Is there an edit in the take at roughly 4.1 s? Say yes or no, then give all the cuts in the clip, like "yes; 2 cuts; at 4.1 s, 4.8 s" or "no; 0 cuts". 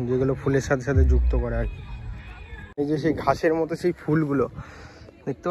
no; 1 cut; at 2.8 s